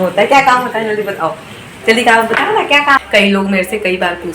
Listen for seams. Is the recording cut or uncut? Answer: cut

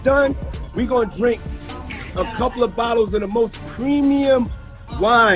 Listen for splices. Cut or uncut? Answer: uncut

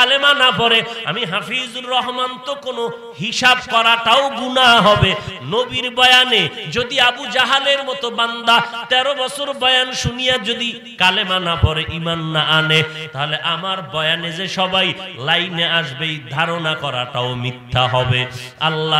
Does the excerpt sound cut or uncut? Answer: uncut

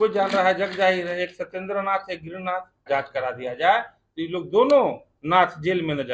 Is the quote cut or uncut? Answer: cut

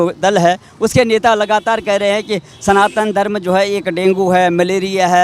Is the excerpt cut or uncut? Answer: uncut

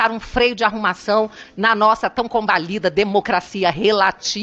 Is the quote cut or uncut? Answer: uncut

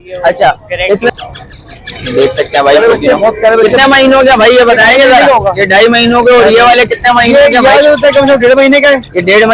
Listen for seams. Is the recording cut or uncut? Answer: cut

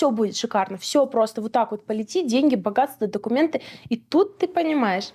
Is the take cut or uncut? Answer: uncut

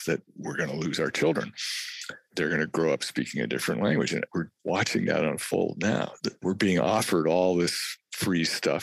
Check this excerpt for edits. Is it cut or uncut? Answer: cut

